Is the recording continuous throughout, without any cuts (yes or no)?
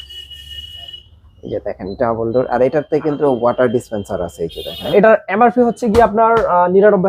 no